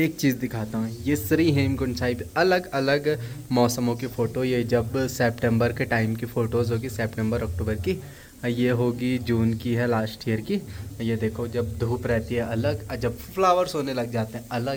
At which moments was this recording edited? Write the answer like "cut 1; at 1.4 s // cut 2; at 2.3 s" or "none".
none